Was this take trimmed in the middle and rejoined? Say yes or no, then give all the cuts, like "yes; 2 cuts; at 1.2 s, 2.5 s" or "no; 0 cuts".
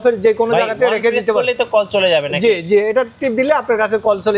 no; 0 cuts